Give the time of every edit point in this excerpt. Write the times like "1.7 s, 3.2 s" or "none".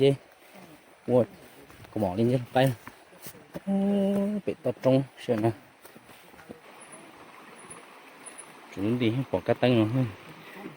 6.6 s